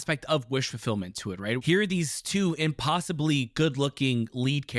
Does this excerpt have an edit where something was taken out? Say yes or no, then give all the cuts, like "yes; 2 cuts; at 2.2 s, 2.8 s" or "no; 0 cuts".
yes; 1 cut; at 1.6 s